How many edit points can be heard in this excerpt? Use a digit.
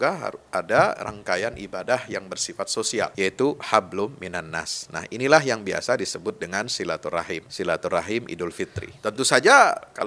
3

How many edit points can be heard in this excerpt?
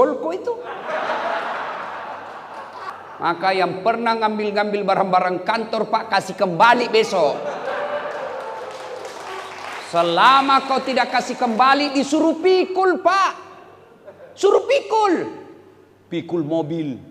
1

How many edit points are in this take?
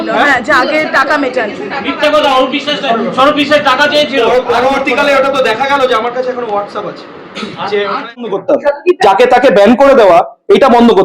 1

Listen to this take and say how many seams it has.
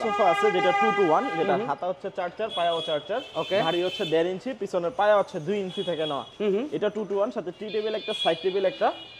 0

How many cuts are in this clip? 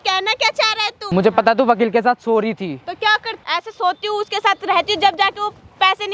2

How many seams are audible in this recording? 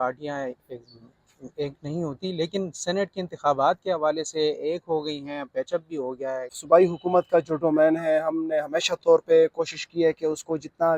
1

